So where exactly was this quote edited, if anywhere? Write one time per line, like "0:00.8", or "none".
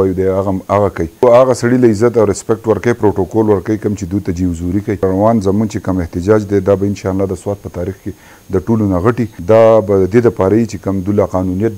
0:01.2
0:05.0
0:09.4